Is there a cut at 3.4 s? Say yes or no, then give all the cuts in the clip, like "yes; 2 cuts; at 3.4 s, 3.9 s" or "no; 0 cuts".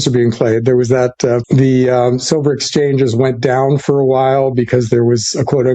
no; 1 cut; at 1.4 s